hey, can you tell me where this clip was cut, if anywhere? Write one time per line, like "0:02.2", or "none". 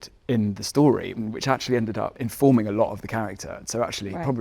0:01.2
0:02.2